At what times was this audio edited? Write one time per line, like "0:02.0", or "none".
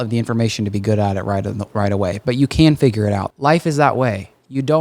0:03.2